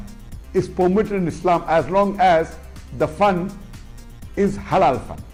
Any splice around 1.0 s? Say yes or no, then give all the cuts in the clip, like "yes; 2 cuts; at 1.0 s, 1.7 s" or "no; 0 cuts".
no; 0 cuts